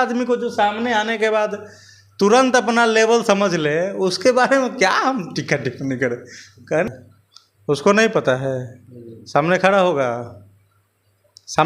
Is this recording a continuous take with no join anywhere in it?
no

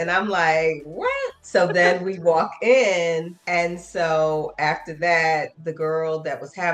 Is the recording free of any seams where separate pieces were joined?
yes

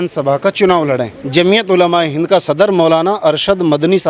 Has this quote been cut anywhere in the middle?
yes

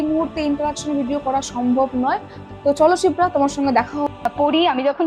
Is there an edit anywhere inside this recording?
yes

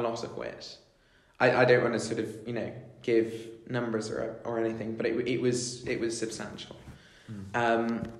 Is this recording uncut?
yes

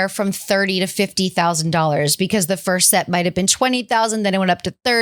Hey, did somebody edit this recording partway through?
no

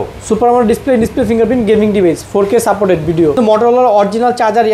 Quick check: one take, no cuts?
no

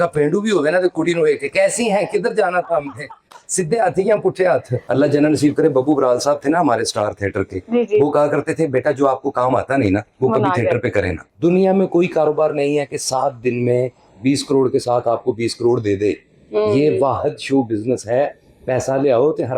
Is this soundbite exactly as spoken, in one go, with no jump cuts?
no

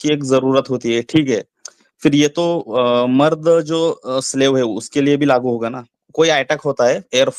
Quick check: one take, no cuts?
no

